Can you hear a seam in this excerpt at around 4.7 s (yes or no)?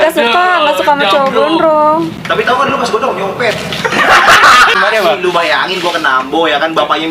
yes